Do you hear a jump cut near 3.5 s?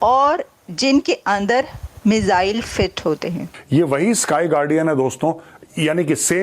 yes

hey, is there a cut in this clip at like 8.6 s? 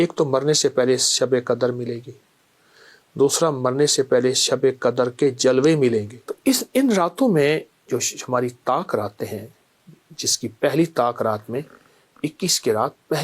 no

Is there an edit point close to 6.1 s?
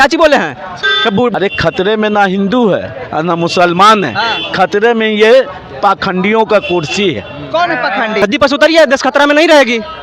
no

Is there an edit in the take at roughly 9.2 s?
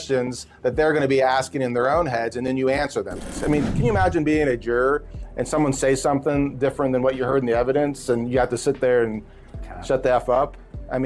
no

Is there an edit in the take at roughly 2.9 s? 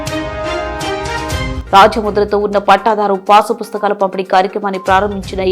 no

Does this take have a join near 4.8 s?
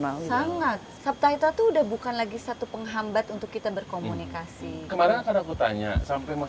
yes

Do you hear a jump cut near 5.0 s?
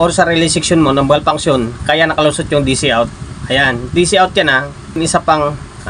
yes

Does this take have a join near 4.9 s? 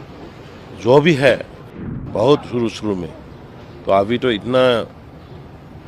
no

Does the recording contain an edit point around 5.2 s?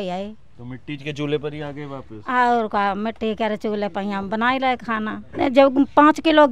yes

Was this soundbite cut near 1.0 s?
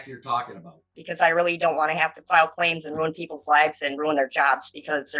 yes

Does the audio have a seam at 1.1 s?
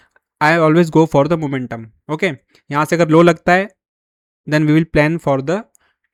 no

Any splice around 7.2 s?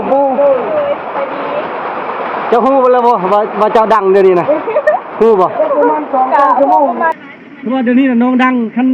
yes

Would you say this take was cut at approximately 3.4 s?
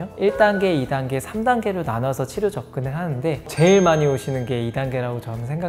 yes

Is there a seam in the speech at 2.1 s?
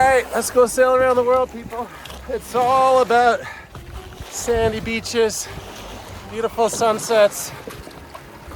yes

